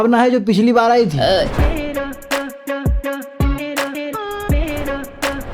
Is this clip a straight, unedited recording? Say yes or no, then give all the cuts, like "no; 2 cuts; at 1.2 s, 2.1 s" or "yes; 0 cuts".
no; 1 cut; at 1.3 s